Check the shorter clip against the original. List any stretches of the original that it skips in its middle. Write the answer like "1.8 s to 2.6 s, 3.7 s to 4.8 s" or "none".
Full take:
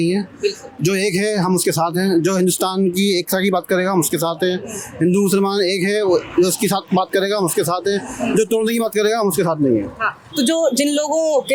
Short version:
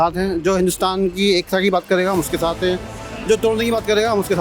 4.9 s to 8.1 s